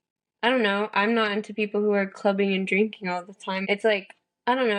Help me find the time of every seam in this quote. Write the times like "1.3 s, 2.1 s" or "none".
3.6 s